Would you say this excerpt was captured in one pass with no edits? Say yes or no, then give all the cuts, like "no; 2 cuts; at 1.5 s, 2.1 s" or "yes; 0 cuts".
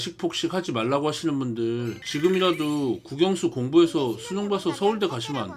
yes; 0 cuts